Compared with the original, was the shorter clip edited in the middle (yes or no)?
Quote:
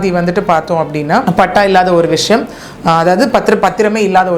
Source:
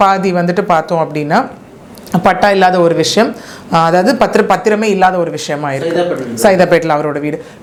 yes